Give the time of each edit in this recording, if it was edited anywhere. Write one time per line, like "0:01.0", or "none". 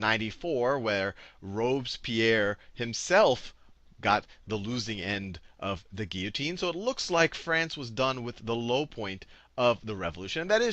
0:06.8